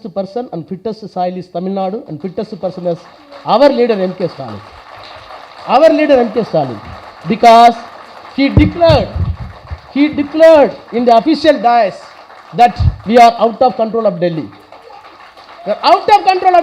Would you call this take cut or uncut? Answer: uncut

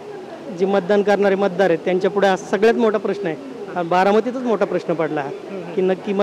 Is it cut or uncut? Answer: uncut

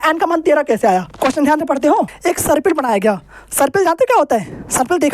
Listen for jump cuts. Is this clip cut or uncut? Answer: cut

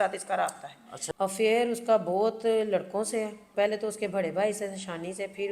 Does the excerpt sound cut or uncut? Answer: cut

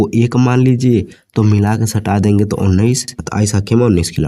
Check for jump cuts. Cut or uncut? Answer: cut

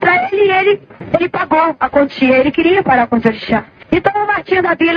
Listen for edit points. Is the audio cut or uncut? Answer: cut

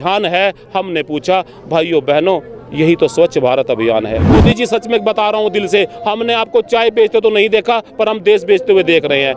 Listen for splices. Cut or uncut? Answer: cut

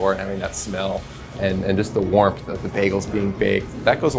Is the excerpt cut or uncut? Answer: uncut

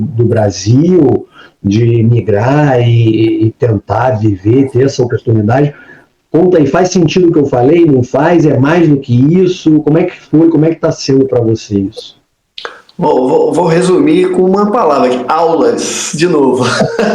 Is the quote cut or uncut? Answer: uncut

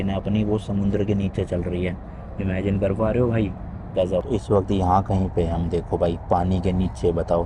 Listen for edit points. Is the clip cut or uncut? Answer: cut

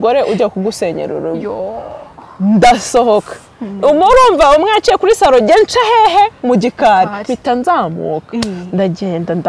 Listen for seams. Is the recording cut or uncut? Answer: uncut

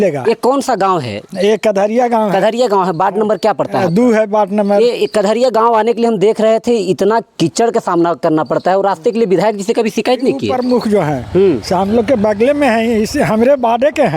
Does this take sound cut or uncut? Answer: cut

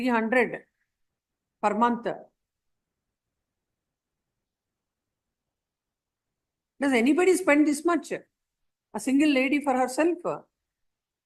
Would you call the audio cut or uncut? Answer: uncut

